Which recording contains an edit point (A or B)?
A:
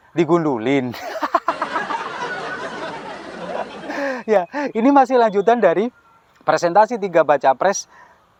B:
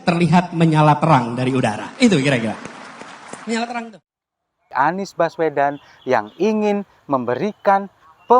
B